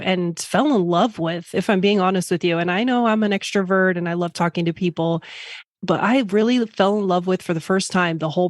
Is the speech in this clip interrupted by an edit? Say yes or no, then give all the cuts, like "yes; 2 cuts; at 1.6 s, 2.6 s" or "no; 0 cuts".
yes; 1 cut; at 5.6 s